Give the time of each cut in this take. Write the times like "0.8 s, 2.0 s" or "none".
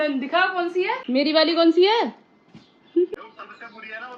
1.0 s, 3.1 s